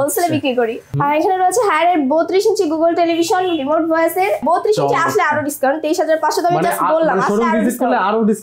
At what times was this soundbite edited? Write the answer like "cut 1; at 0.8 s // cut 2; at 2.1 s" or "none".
cut 1; at 0.9 s // cut 2; at 4.4 s